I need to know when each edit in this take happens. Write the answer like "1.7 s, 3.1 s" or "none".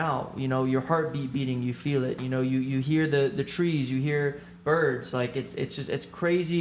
none

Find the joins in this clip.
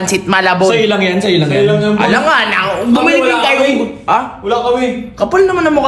none

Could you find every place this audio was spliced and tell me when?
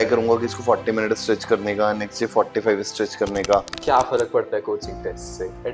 3.7 s

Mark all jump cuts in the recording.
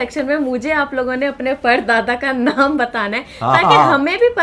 none

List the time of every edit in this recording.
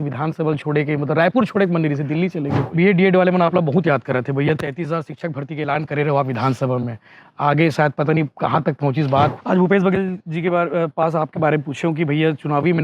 2.6 s, 9.3 s

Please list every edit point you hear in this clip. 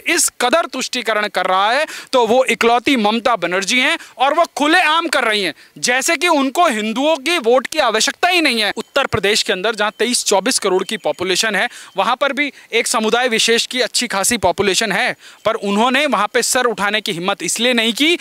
8.8 s

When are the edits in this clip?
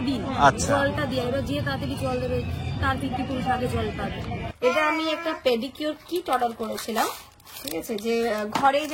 4.5 s

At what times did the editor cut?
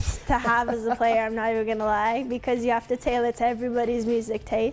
none

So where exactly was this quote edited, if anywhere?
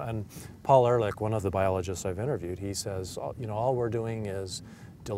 1.4 s

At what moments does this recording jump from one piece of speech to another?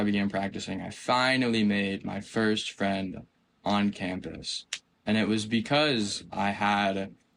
none

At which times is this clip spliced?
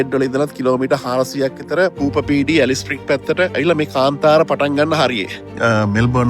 1.9 s, 3.5 s, 5.5 s

